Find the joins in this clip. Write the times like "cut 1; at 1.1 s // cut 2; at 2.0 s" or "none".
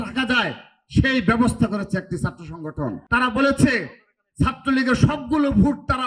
cut 1; at 3.0 s